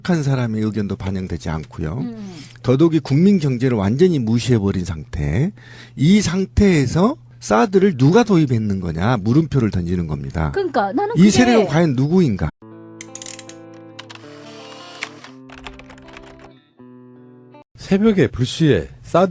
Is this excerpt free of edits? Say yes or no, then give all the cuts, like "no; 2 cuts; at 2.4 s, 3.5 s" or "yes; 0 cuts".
yes; 0 cuts